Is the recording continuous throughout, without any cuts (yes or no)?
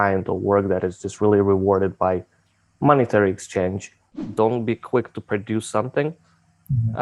no